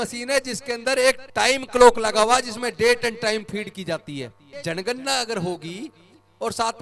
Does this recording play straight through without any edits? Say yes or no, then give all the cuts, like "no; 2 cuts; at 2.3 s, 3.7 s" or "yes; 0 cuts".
no; 2 cuts; at 1.2 s, 4.5 s